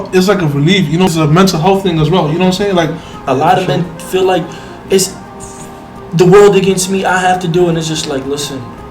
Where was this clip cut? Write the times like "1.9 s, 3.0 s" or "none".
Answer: 1.1 s, 3.1 s